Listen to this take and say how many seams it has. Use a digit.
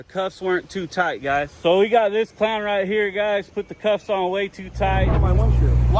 2